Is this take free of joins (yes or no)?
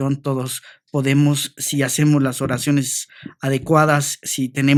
yes